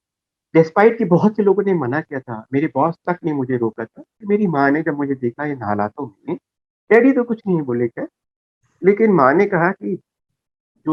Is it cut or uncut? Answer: cut